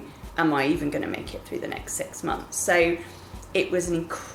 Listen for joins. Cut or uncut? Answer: uncut